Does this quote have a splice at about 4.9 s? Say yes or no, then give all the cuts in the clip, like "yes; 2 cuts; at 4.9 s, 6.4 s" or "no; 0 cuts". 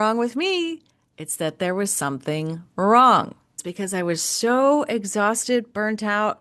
no; 1 cut; at 3.6 s